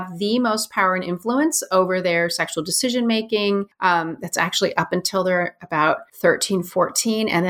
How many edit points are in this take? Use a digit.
2